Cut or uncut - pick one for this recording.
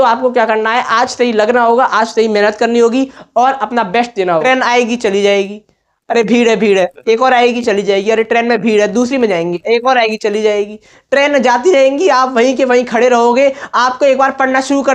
cut